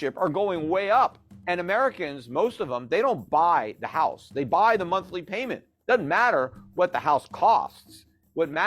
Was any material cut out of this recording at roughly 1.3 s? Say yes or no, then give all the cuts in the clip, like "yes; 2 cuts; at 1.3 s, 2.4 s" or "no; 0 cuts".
yes; 1 cut; at 1.3 s